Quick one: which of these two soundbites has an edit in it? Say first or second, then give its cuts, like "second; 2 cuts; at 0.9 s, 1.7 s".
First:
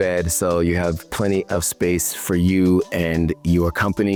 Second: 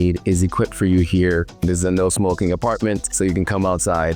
second; 2 cuts; at 1.5 s, 3.1 s